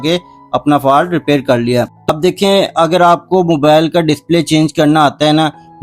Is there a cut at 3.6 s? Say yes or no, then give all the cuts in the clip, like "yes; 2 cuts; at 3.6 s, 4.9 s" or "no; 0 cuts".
no; 1 cut; at 2.1 s